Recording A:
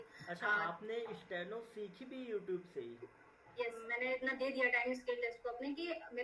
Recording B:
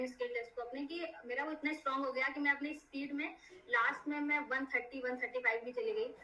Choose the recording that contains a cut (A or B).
A